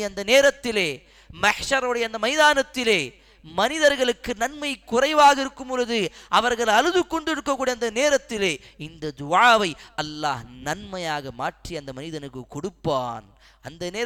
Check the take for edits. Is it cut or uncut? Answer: uncut